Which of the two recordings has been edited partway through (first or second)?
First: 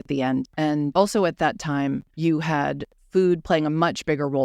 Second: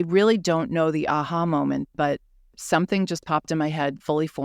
first